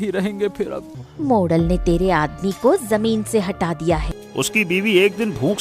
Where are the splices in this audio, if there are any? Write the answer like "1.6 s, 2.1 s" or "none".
1.0 s, 4.2 s